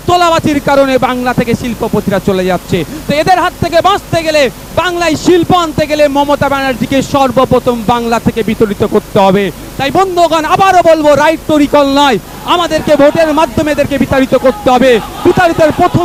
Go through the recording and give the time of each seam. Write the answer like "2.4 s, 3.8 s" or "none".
none